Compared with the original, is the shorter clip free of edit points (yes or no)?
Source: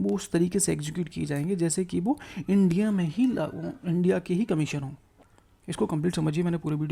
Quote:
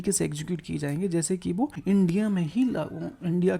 no